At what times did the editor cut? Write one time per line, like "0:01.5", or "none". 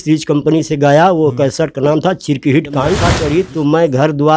0:03.1